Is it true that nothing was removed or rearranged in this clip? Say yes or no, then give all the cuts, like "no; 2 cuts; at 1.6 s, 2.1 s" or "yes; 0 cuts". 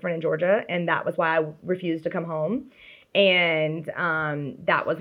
yes; 0 cuts